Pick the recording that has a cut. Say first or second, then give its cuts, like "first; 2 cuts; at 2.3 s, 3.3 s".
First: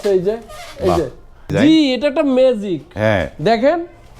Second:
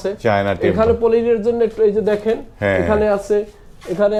first; 1 cut; at 1.5 s